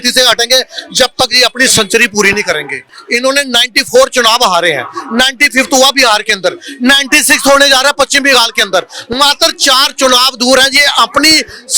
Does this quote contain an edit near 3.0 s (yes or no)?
yes